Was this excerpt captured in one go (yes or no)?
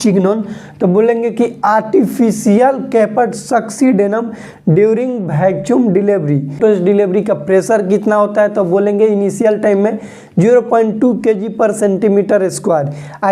no